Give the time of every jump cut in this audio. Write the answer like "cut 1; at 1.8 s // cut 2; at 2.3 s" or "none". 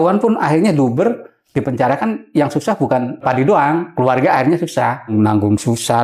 cut 1; at 3.2 s // cut 2; at 5.1 s